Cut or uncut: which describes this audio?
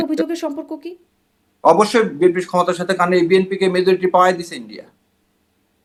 uncut